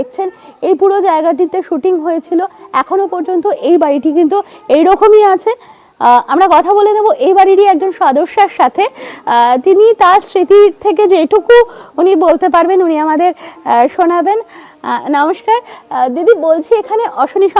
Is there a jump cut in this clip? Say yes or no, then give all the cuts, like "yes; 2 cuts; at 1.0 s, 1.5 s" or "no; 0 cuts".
no; 0 cuts